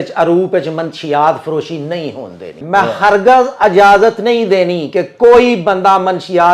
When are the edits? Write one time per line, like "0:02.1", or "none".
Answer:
0:02.6